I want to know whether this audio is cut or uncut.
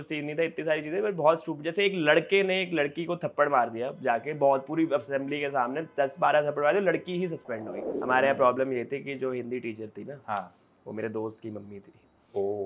cut